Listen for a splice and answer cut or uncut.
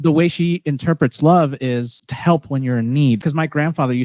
cut